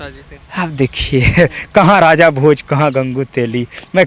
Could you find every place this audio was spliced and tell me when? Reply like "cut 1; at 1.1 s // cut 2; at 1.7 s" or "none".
none